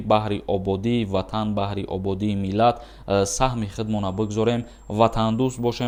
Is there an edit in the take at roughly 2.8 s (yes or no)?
no